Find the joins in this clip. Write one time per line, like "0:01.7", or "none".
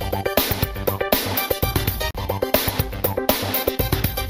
none